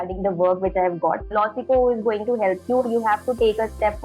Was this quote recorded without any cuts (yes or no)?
no